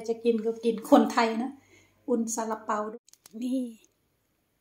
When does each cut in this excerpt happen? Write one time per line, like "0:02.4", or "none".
0:02.9